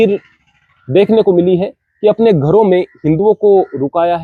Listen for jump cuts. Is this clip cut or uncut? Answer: uncut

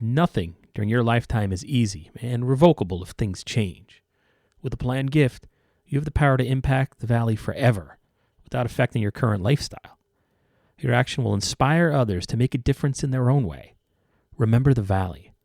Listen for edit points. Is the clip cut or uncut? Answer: uncut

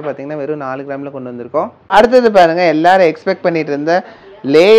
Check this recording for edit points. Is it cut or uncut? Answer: uncut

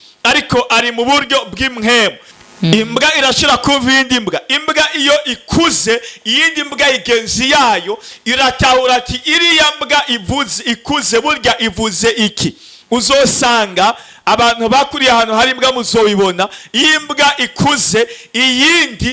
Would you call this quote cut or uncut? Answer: cut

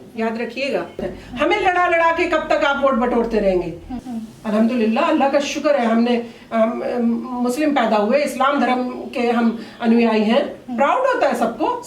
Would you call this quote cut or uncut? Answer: cut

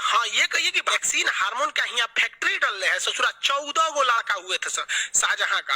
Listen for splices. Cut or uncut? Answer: cut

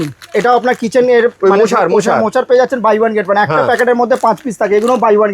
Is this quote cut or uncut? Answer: uncut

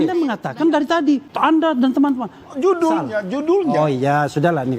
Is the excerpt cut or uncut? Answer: cut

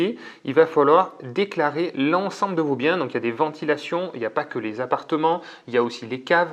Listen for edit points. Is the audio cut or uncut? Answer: uncut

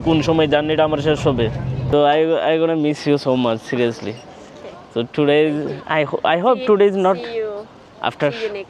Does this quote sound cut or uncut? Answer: cut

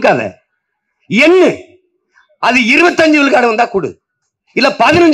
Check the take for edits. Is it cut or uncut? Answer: uncut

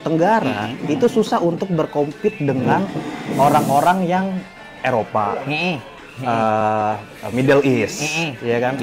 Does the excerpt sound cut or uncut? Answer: uncut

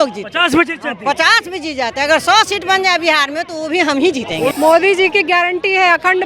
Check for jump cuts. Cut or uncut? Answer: cut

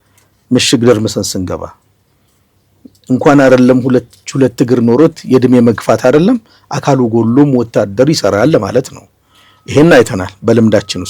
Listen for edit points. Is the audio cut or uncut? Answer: uncut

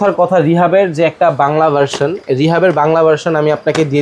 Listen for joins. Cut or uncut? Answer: uncut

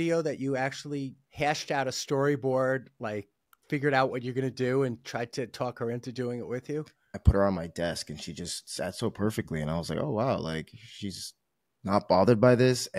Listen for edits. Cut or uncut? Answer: cut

